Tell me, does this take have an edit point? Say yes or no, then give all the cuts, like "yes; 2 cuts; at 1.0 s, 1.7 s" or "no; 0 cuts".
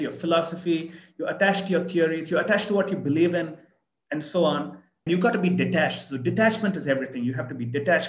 yes; 1 cut; at 4.9 s